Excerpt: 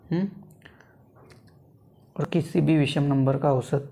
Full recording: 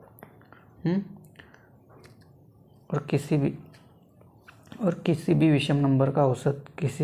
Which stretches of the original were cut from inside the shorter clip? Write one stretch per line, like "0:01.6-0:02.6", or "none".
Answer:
0:03.0-0:05.0